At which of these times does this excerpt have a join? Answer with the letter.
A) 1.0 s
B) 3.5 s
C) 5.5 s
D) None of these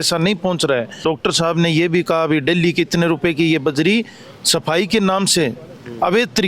A